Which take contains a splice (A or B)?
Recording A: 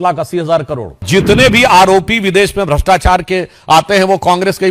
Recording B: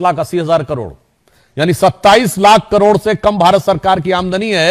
A